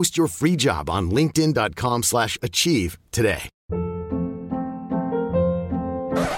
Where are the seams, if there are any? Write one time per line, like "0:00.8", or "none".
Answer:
0:03.5